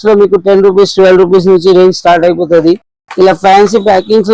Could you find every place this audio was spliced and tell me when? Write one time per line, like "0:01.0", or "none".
none